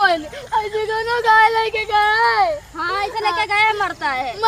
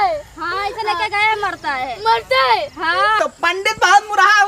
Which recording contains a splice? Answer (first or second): second